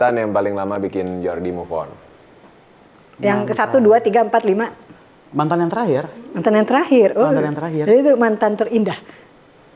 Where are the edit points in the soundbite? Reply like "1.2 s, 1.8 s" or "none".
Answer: none